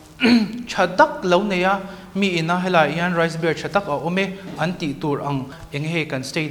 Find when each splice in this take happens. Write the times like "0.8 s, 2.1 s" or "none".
5.6 s

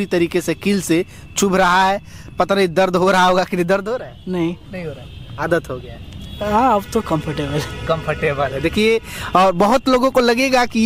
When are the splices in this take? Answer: none

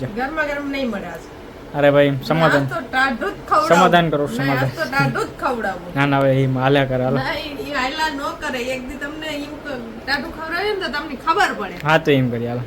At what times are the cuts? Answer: none

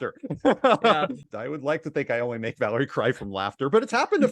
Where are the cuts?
1.3 s

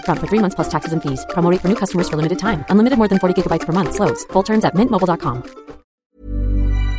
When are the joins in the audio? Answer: 6.1 s

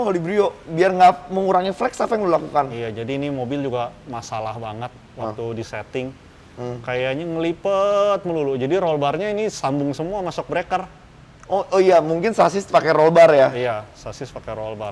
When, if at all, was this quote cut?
none

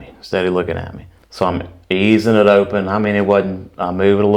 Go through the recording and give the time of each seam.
none

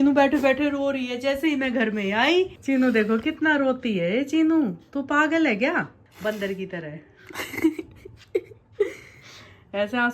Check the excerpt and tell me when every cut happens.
2.6 s, 6.0 s

